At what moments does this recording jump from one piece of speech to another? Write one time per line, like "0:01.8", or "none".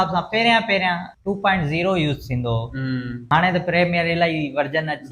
0:01.1
0:03.3